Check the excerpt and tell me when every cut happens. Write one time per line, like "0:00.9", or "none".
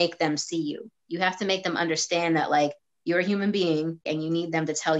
0:04.1